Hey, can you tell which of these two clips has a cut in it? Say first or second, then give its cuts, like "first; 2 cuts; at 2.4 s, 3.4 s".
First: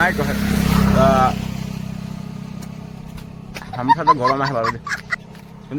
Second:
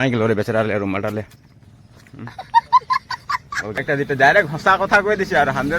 second; 1 cut; at 3.8 s